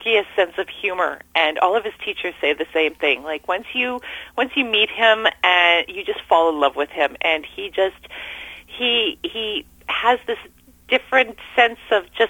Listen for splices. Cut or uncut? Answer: uncut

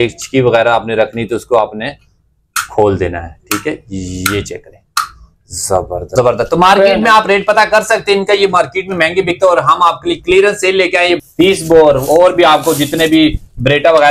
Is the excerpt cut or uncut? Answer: cut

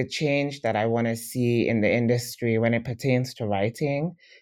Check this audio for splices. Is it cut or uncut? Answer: uncut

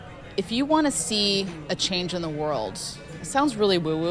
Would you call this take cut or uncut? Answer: uncut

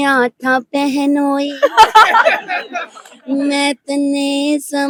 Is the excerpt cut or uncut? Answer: uncut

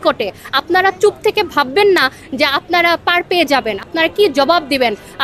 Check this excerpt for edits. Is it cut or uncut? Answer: cut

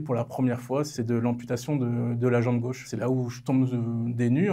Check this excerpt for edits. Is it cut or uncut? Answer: cut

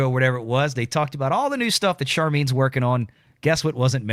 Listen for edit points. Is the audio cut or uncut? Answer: uncut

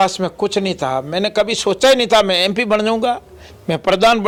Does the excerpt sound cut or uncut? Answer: uncut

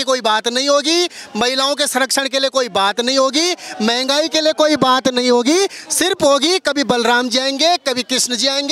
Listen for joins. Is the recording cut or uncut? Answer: uncut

